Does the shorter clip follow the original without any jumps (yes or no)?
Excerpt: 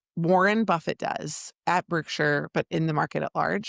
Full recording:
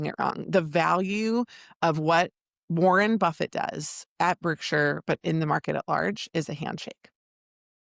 yes